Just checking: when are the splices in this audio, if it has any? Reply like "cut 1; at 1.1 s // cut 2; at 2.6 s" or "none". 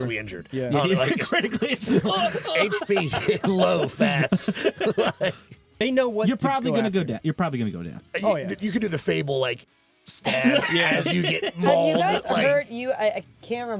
cut 1; at 5.7 s

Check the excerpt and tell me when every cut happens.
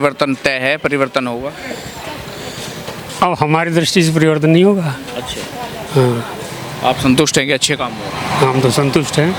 none

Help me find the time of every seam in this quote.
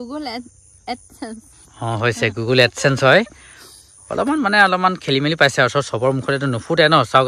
none

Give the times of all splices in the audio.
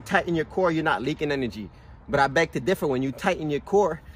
none

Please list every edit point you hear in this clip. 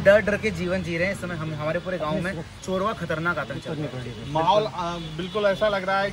none

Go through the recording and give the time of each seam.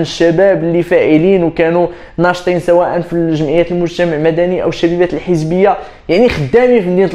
none

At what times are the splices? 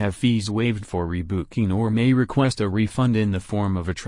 cut 1; at 1.6 s

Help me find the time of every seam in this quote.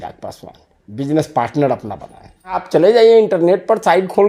cut 1; at 2.6 s

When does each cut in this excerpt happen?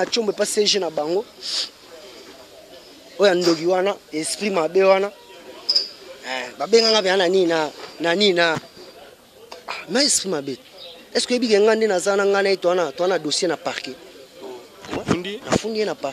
cut 1; at 8.8 s

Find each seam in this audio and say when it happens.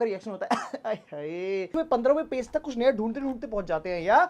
cut 1; at 1.7 s

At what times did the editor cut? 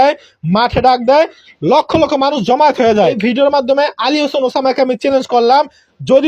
cut 1; at 3.1 s

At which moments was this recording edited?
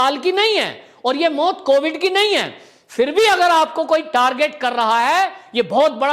none

